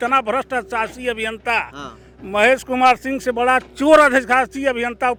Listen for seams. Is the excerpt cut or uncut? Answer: uncut